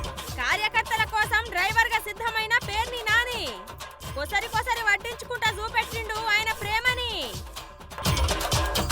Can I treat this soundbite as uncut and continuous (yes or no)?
no